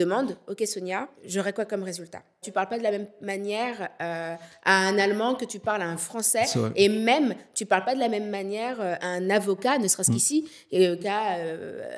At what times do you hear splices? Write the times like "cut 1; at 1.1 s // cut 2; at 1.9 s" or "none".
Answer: cut 1; at 1.2 s // cut 2; at 2.5 s // cut 3; at 9.0 s // cut 4; at 11.0 s